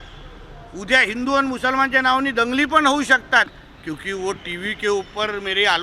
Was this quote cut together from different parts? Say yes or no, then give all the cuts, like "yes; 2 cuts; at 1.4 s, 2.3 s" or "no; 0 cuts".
yes; 1 cut; at 3.6 s